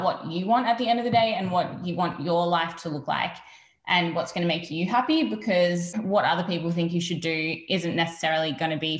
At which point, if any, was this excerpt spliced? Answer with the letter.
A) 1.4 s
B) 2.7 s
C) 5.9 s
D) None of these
C